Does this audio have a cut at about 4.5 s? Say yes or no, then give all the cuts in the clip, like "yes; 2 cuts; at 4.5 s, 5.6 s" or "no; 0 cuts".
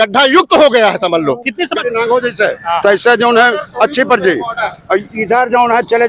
no; 1 cut; at 1.8 s